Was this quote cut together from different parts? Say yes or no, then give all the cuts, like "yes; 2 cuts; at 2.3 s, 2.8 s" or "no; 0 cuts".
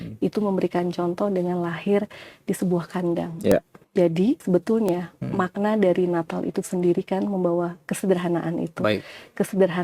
yes; 2 cuts; at 3.5 s, 4.4 s